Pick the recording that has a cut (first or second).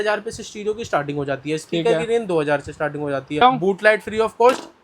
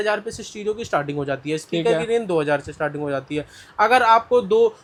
first